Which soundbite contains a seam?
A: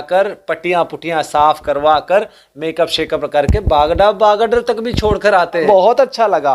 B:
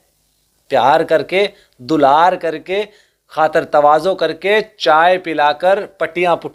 A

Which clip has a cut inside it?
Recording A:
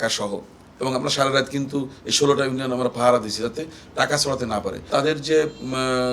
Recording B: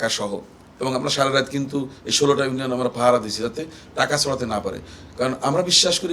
A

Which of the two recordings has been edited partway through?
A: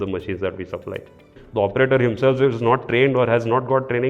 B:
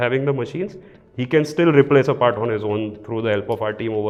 A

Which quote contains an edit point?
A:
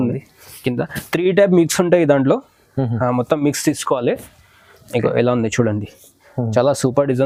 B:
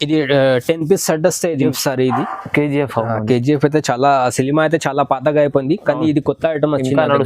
B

